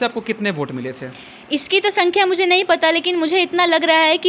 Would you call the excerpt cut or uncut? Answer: uncut